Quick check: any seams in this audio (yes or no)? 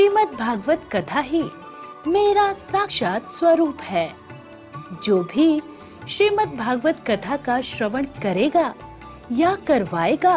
yes